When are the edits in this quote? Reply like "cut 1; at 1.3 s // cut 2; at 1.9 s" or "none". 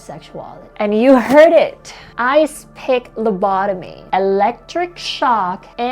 cut 1; at 3.9 s